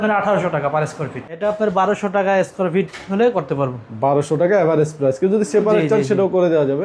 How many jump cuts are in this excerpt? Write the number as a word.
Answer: one